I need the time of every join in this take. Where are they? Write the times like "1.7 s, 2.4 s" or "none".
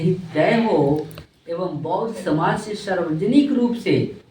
none